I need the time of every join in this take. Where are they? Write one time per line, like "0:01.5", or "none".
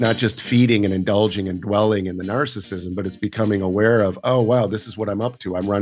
none